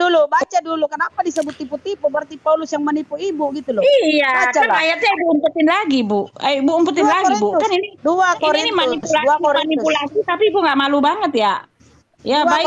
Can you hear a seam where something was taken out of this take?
no; 0 cuts

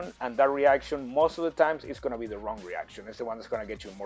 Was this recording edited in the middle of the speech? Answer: no; 0 cuts

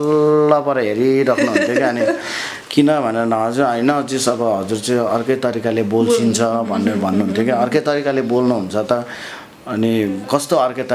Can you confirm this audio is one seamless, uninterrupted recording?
yes; 0 cuts

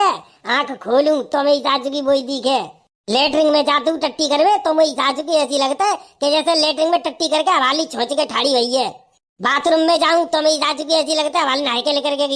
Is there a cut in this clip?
no; 0 cuts

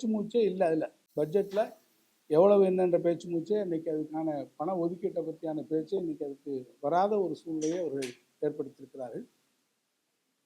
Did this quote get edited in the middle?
no; 0 cuts

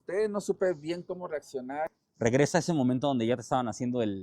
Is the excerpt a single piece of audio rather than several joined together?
no; 1 cut; at 2.0 s

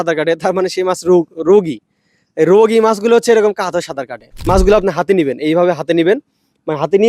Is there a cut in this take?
yes; 1 cut; at 4.3 s

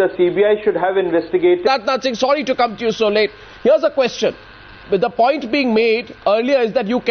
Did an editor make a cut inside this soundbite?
no; 0 cuts

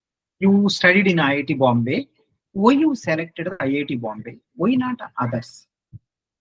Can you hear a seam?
no; 0 cuts

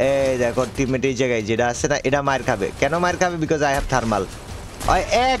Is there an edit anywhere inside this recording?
no; 0 cuts

